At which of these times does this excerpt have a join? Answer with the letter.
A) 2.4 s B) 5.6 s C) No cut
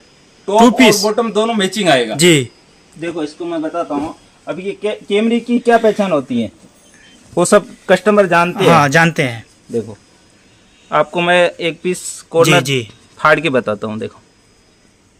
C